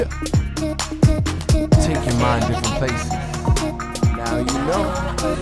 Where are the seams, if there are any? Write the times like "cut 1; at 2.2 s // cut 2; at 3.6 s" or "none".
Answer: none